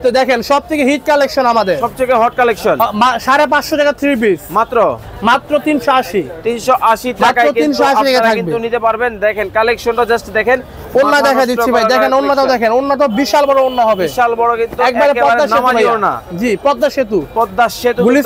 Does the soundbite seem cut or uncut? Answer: uncut